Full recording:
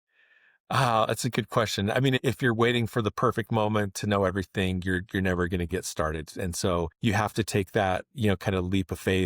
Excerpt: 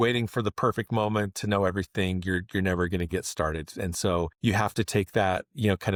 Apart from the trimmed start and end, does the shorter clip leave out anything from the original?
no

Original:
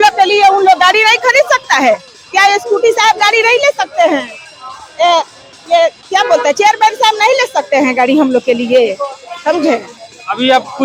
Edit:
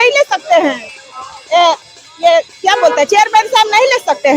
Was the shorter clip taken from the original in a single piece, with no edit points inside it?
yes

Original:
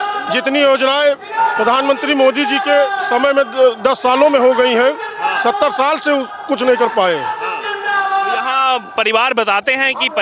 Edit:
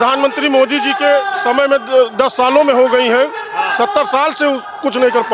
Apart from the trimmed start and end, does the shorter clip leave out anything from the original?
no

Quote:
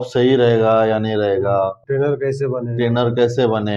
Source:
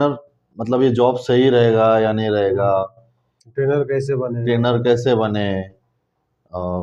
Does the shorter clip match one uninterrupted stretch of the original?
no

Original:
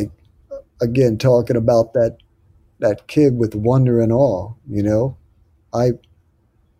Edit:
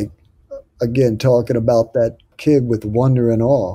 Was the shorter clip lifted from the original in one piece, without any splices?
no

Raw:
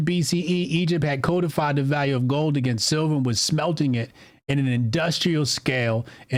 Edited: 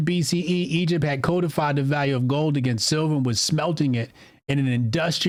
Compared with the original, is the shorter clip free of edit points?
yes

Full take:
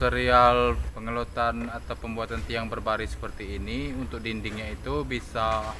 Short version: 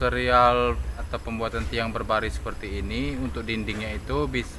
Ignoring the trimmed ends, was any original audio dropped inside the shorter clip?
yes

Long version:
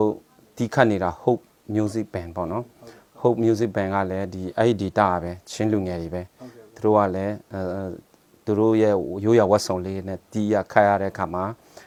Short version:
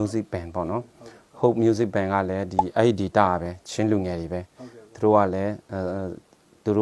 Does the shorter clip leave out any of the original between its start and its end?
no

